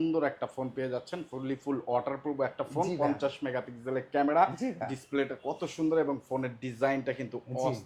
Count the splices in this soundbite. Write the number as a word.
zero